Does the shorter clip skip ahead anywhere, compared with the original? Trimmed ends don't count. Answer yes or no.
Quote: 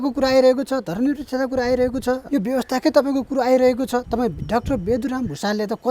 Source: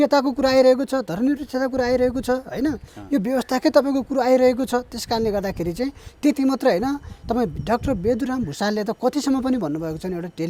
yes